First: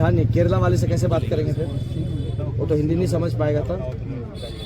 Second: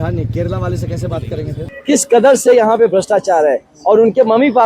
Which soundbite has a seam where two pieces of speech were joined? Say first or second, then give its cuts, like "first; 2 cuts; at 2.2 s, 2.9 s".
second; 1 cut; at 1.7 s